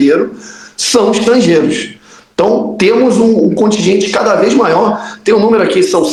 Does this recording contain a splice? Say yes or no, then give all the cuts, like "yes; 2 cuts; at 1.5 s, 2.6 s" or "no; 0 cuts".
no; 0 cuts